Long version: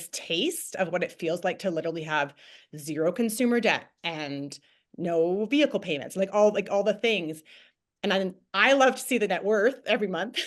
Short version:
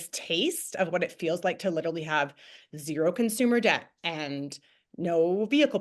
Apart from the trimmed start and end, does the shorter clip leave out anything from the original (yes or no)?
no